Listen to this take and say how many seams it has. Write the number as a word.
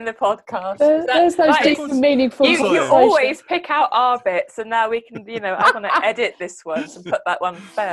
zero